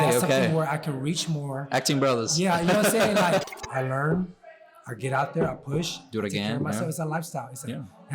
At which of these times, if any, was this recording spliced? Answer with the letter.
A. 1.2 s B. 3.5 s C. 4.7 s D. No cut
B